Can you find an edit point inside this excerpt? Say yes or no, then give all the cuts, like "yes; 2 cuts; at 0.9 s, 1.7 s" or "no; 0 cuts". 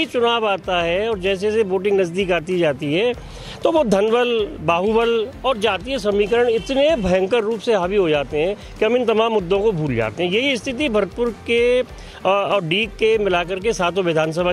no; 0 cuts